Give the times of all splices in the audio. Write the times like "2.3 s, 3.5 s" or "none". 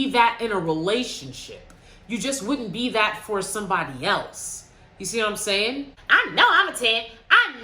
5.9 s